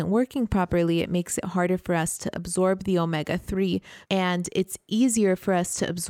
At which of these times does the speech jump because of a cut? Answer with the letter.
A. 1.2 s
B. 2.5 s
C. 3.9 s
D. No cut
C